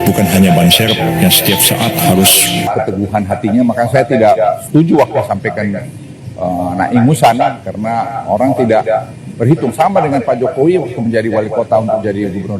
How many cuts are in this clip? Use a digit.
1